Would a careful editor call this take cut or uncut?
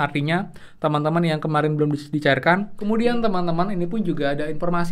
cut